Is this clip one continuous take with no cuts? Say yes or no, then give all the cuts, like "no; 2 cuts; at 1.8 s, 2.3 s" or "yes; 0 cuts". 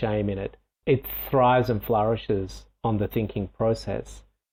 yes; 0 cuts